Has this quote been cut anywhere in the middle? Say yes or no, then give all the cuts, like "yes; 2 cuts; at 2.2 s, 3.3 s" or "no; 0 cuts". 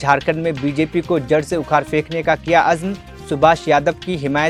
no; 0 cuts